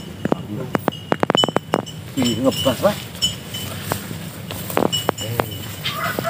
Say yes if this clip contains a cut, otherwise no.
no